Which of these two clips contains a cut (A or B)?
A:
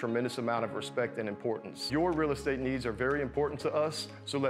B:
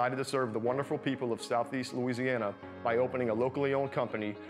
A